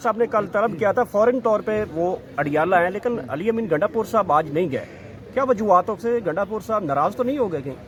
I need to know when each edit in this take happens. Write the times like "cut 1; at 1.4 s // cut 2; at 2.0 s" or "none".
none